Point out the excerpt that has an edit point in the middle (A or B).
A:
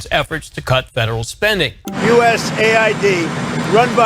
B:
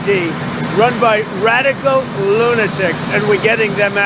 A